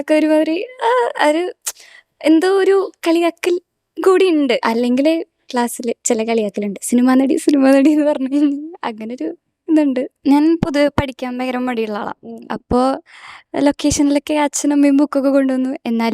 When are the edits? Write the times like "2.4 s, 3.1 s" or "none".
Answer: 4.6 s, 10.2 s